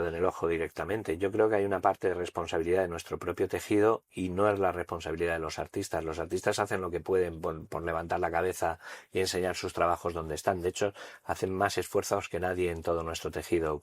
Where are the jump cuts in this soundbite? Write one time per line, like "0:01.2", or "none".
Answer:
none